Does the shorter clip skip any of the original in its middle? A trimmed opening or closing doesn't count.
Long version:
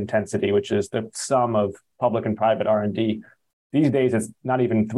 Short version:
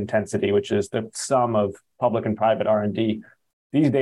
no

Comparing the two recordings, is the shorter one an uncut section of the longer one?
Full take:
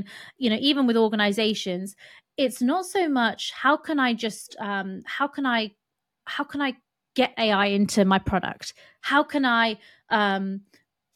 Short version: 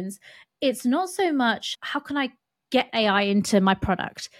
no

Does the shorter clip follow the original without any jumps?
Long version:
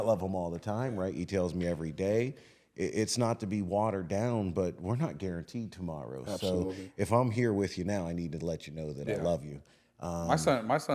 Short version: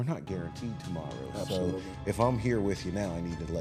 yes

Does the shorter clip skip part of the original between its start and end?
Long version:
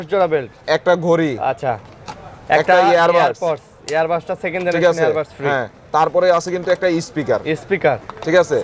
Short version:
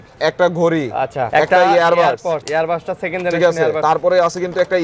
yes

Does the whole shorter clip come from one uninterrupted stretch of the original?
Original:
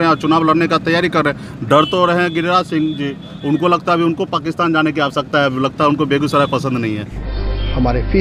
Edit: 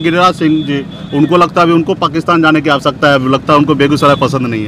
yes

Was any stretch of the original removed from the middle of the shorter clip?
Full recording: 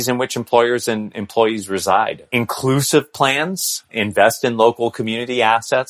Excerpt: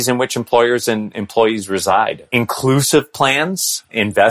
no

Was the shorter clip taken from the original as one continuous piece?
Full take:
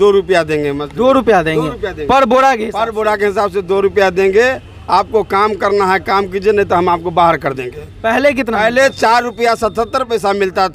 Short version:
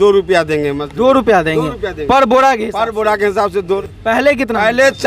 no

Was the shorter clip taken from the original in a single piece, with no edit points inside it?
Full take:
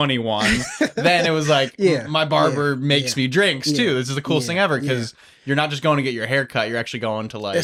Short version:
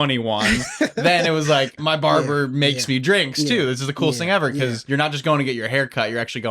no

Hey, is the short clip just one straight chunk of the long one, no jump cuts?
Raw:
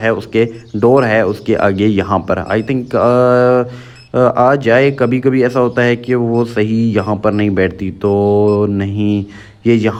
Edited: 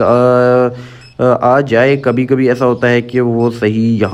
yes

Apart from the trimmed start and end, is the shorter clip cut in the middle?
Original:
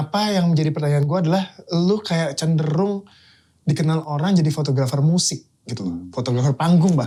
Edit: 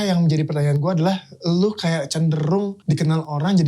yes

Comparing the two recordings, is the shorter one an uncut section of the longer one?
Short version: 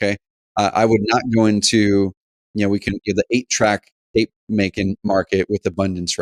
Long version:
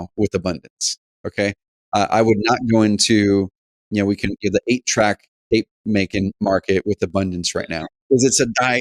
yes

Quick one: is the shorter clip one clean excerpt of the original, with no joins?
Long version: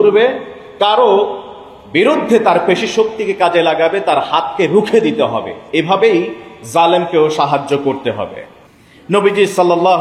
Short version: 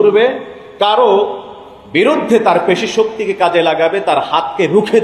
yes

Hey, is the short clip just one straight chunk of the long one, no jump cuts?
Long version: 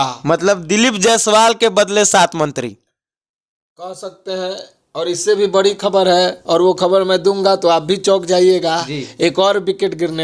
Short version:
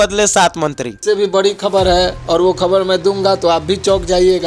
no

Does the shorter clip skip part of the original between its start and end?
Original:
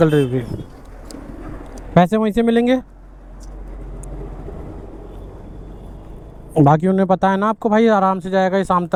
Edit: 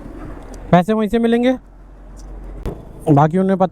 yes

